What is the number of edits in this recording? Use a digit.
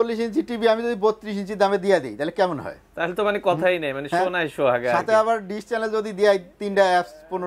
0